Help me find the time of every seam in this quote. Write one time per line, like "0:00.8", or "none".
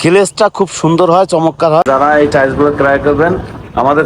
0:01.8